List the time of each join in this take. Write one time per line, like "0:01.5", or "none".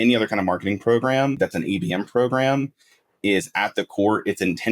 0:01.3